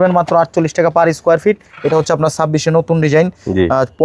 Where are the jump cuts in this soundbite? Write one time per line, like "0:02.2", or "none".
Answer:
0:01.7